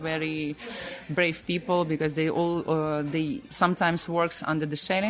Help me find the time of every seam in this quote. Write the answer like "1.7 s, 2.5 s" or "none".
3.4 s